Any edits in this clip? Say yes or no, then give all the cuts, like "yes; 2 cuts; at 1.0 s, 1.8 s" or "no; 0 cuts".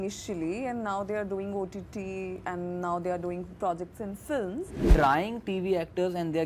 yes; 1 cut; at 4.7 s